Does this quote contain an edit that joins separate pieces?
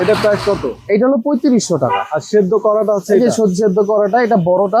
no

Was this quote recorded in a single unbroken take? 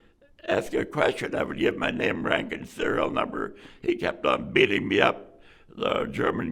yes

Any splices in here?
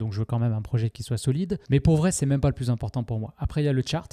yes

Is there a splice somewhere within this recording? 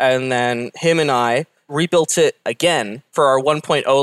yes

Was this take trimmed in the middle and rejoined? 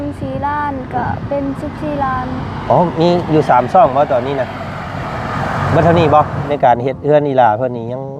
yes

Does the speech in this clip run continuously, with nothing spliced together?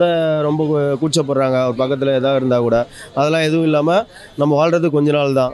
yes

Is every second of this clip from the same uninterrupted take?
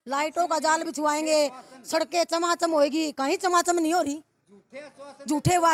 yes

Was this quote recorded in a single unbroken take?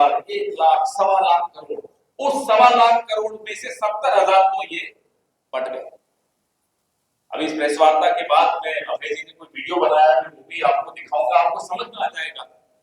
yes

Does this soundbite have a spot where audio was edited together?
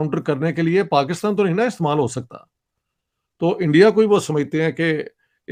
no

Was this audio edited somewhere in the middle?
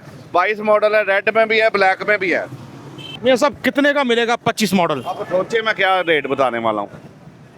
yes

